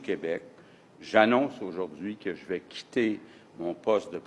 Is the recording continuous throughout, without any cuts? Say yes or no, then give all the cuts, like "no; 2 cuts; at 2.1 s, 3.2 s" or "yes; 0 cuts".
yes; 0 cuts